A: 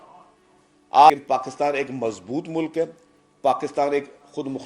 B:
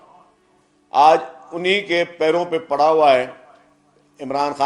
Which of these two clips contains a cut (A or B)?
A